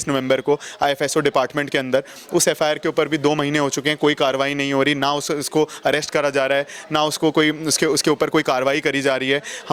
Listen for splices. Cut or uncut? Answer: uncut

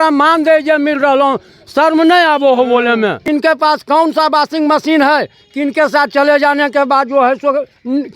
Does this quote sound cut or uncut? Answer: cut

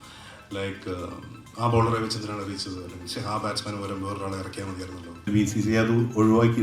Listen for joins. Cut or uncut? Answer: cut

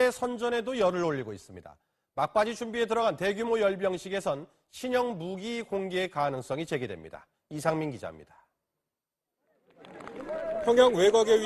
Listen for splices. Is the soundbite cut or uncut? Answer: uncut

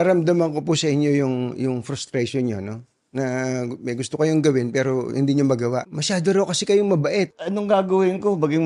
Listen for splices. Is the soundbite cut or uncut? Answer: cut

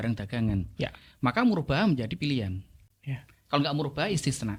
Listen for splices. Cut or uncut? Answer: uncut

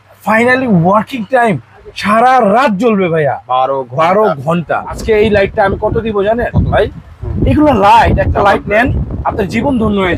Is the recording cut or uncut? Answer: cut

